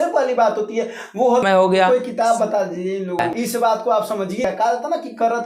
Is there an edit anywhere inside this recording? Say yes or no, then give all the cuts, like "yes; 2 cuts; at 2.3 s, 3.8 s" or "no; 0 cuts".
yes; 3 cuts; at 1.4 s, 3.3 s, 4.4 s